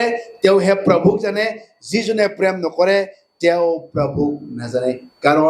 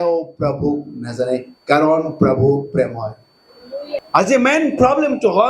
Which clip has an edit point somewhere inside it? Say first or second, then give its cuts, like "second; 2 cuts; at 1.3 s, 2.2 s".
second; 1 cut; at 4.1 s